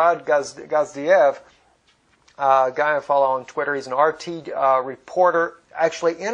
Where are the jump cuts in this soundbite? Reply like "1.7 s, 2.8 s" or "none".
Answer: none